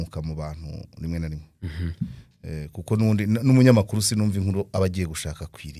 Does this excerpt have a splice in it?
no; 0 cuts

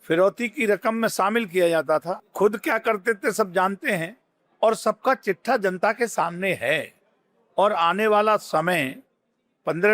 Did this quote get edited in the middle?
no; 0 cuts

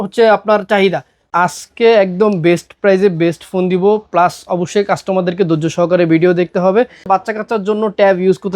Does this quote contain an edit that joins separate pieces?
yes; 2 cuts; at 1.2 s, 7.1 s

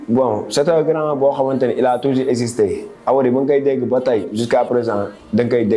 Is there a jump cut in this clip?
no; 0 cuts

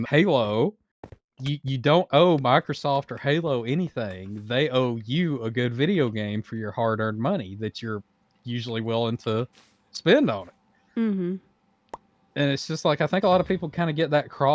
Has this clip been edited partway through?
no; 0 cuts

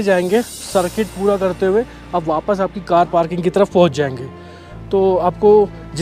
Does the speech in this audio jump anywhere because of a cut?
no; 0 cuts

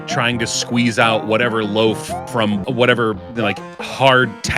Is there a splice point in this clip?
yes; 1 cut; at 2.6 s

